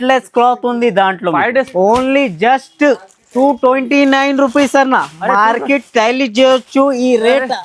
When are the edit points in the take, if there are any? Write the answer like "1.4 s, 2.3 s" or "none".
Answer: 1.7 s